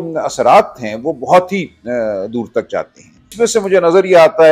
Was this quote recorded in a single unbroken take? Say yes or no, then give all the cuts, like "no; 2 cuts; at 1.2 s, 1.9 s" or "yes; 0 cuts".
no; 1 cut; at 3.3 s